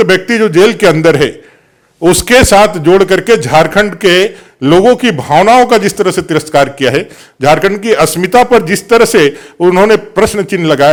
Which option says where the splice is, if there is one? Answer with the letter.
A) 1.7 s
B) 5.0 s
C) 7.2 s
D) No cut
D